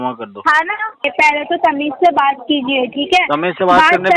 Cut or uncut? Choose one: cut